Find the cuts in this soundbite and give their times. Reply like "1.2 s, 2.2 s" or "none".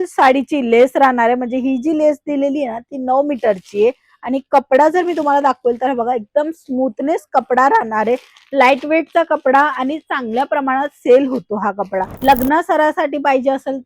12.1 s